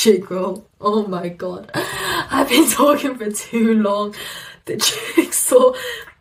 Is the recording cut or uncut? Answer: uncut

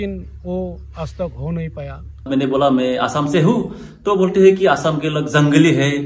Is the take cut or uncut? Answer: cut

